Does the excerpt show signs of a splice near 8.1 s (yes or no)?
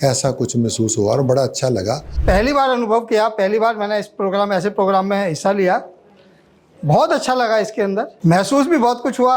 yes